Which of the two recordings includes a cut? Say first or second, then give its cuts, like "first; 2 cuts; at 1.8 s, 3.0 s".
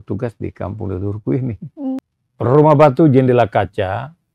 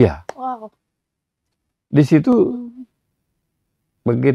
first; 1 cut; at 2.0 s